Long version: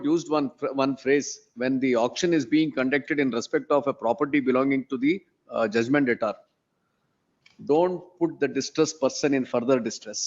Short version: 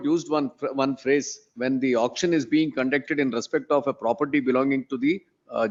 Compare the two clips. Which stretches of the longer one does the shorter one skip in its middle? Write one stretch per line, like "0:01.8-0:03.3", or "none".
none

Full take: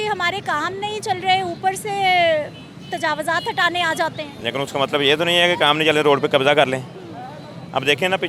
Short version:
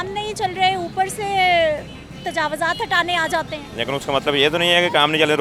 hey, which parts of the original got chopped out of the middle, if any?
none

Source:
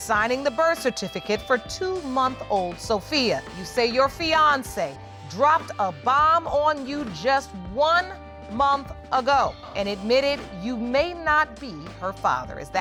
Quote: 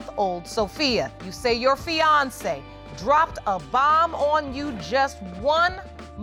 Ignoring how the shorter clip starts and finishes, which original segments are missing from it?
none

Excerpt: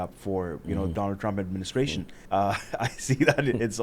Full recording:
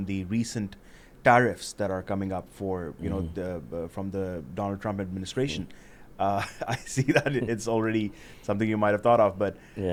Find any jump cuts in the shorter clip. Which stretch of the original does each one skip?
0:03.3-0:04.5
0:05.7-0:06.0

